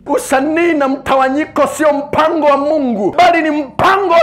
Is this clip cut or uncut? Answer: cut